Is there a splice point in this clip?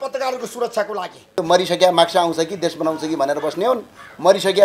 yes; 1 cut; at 1.3 s

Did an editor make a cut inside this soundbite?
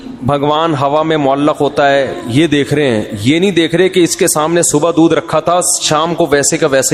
no; 0 cuts

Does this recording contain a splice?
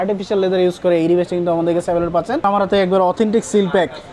yes; 1 cut; at 2.4 s

